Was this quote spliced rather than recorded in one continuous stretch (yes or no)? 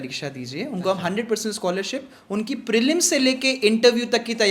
no